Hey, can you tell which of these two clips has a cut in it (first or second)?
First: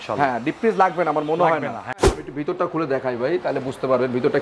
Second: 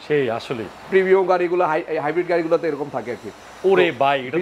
first